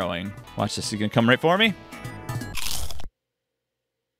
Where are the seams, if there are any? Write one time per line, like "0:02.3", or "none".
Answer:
none